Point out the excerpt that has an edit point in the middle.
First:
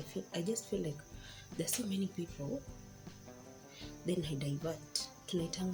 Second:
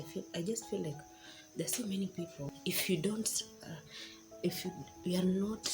second; 1 cut; at 2.4 s

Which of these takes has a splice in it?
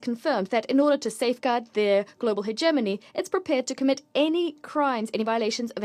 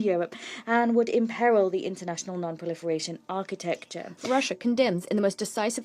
second; 1 cut; at 4.1 s

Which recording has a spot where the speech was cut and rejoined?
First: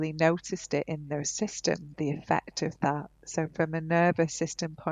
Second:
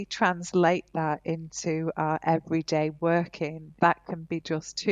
second; 1 cut; at 3.7 s

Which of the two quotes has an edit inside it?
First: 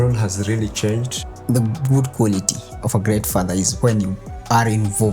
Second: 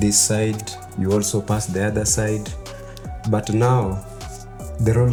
first; 1 cut; at 1.2 s

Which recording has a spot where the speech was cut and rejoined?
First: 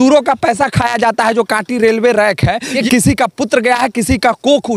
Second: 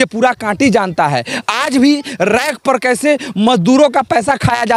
first; 1 cut; at 2.8 s

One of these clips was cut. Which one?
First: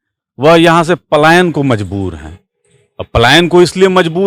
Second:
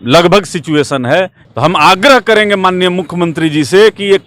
second; 1 cut; at 1.4 s

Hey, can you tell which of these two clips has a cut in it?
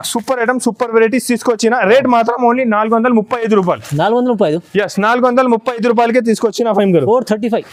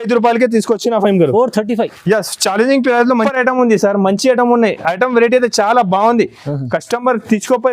second; 1 cut; at 3.3 s

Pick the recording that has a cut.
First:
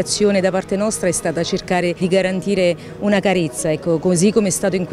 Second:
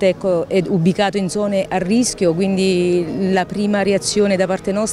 first; 1 cut; at 2.0 s

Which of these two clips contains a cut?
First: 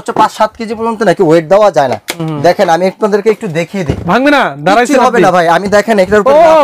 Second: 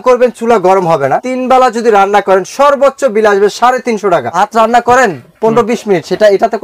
second; 2 cuts; at 1.3 s, 4.3 s

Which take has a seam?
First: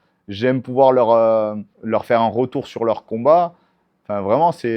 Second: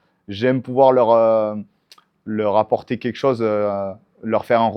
first; 1 cut; at 1.7 s

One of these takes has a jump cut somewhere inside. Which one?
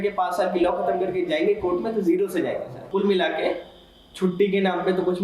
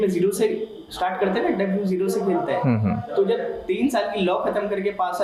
first; 1 cut; at 2.8 s

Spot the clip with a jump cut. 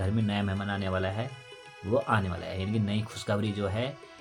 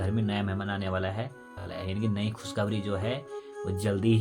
second; 1 cut; at 1.7 s

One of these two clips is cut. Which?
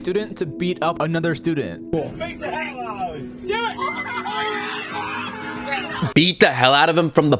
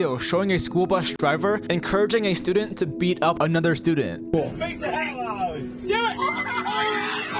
second; 1 cut; at 1.0 s

